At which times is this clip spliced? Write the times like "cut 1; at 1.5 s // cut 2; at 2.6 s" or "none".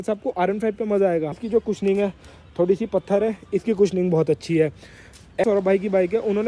cut 1; at 1.4 s // cut 2; at 5.4 s